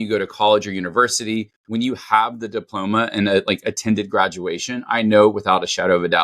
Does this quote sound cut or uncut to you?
cut